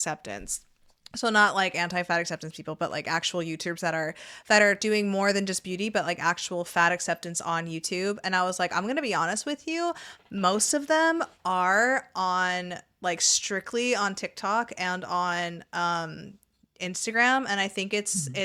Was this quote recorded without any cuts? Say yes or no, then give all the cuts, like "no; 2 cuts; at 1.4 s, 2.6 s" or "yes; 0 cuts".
yes; 0 cuts